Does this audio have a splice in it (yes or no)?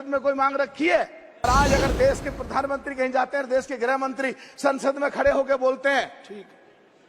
yes